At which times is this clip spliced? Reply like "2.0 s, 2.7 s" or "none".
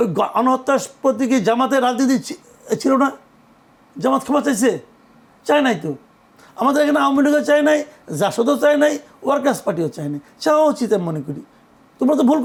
none